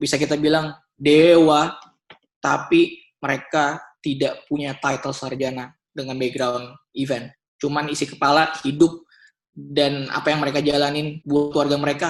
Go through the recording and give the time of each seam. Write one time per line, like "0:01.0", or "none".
none